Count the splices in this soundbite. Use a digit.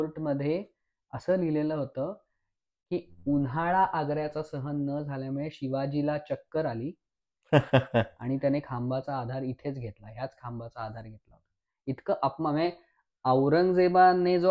0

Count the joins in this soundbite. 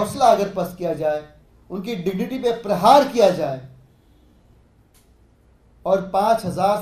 1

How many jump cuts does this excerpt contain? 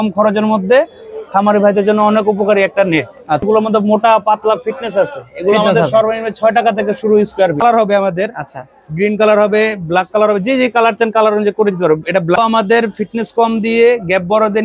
3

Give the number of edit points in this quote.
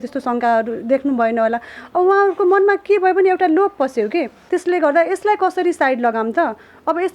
1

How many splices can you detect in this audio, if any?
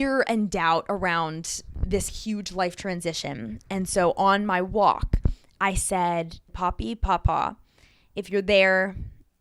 2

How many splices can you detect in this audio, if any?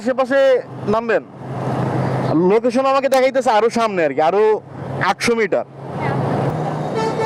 0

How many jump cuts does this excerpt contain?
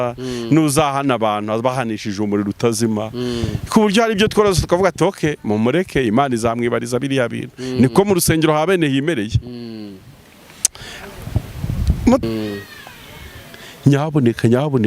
1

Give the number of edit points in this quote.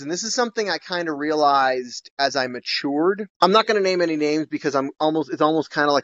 0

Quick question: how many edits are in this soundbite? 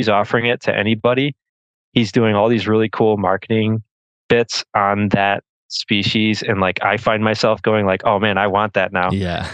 0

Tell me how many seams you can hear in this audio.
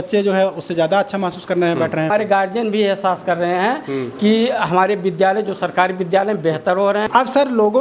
2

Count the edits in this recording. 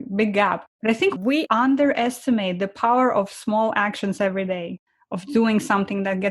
2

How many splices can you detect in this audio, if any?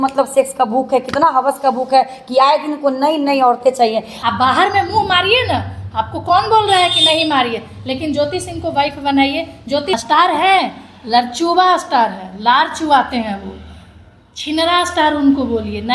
2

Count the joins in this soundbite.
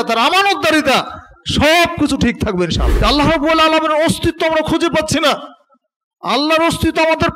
1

